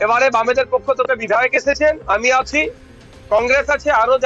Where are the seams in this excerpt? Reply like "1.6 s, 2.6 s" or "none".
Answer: none